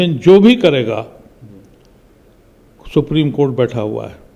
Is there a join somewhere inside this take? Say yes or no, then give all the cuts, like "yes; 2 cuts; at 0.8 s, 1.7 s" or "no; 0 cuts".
no; 0 cuts